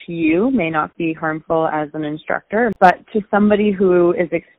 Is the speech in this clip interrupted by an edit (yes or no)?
yes